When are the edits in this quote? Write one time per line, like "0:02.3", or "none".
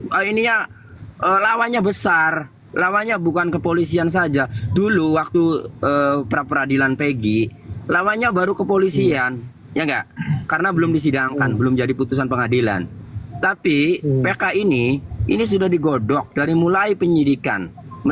none